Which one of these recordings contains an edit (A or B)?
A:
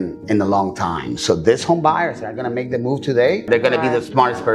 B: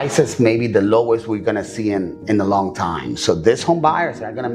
A